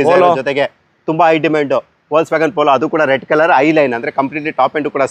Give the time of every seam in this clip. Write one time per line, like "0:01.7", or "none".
none